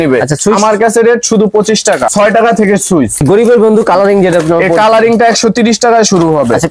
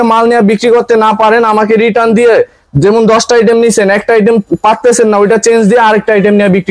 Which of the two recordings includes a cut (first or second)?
first